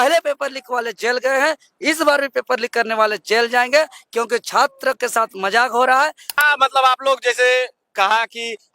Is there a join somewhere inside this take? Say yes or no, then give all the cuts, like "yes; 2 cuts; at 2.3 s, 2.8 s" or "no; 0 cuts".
yes; 1 cut; at 6.4 s